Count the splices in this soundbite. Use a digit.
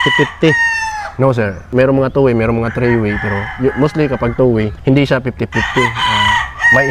2